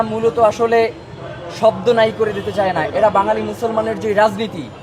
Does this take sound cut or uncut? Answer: uncut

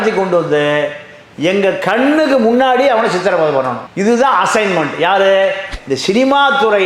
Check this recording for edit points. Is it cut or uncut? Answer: cut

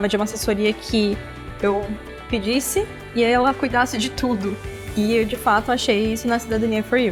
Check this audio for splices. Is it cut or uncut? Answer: uncut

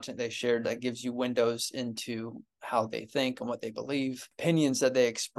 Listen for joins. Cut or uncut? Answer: cut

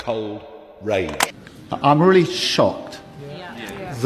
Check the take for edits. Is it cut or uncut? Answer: cut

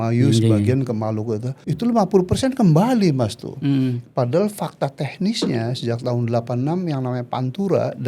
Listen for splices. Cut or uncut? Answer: cut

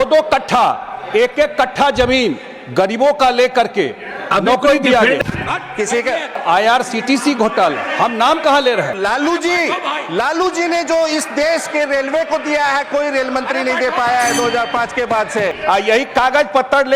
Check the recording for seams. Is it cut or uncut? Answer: cut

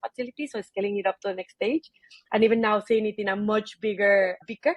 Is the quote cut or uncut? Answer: uncut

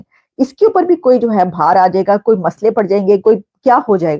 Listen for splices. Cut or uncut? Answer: uncut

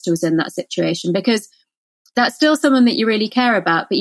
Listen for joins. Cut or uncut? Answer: uncut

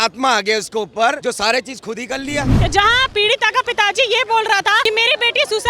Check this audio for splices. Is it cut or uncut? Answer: cut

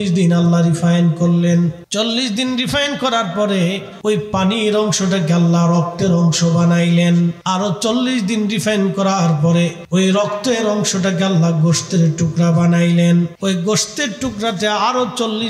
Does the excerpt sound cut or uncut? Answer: cut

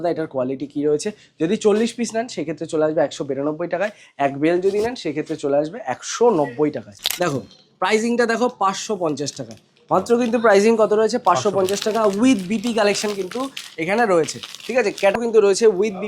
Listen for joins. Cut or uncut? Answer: cut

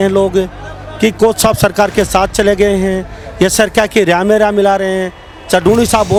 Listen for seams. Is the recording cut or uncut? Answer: uncut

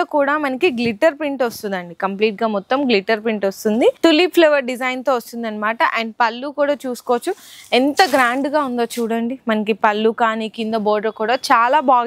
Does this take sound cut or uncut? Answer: uncut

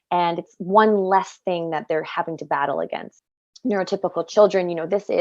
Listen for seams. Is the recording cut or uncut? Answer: cut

